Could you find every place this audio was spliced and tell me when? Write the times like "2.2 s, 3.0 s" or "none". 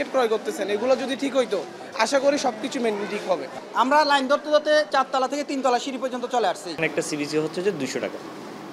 3.5 s, 4.9 s, 6.7 s